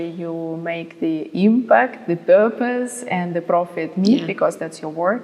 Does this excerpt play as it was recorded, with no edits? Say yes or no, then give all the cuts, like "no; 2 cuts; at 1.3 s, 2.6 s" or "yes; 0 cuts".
yes; 0 cuts